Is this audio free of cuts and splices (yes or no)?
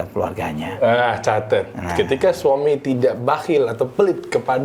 yes